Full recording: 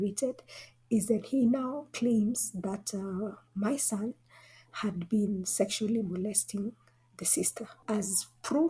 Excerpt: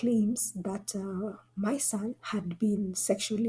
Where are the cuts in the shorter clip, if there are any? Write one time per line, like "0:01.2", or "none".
0:02.2